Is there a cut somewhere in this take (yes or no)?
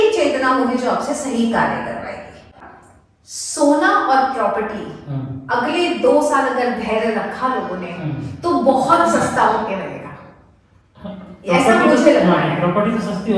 yes